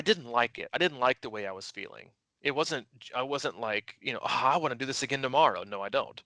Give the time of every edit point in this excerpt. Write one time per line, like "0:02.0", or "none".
none

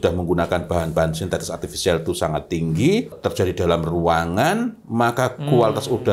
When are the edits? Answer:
0:03.2

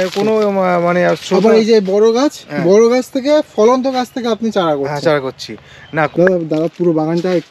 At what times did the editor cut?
0:06.1

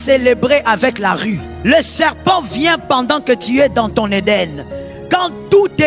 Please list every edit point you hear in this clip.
0:01.5

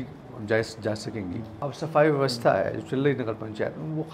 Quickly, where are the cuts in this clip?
0:01.6

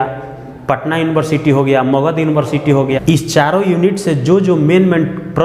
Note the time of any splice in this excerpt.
0:03.0

